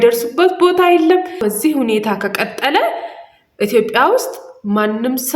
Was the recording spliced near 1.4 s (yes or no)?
yes